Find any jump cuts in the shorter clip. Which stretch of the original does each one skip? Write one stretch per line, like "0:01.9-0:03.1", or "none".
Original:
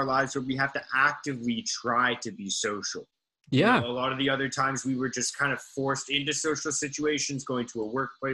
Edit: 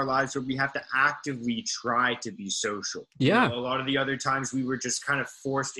0:03.0-0:03.3